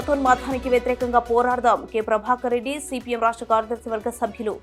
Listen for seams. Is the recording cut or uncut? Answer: uncut